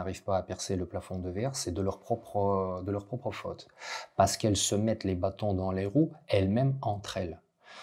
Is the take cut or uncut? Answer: uncut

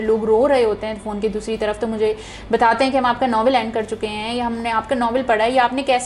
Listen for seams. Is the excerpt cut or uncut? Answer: uncut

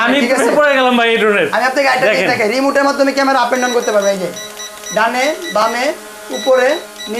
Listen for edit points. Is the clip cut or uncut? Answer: uncut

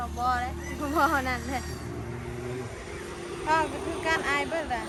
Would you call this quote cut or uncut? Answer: uncut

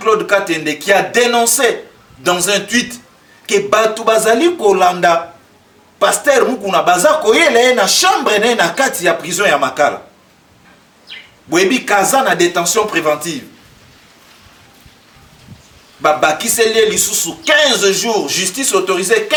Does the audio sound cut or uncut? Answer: uncut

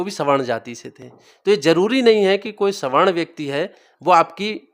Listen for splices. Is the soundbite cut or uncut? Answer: uncut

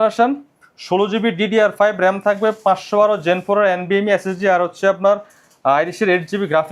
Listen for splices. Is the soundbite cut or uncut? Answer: uncut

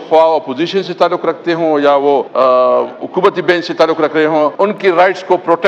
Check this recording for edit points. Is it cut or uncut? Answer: cut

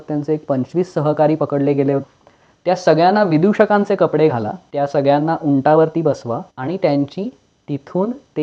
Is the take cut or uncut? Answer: cut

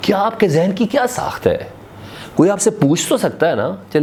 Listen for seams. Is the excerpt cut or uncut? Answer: uncut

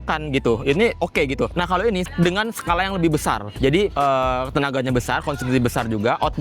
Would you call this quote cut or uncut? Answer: cut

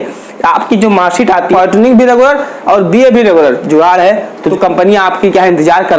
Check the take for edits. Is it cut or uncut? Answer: cut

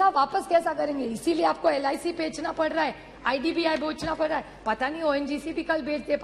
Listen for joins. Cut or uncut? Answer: uncut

